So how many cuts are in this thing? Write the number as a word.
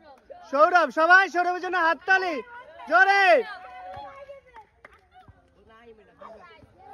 zero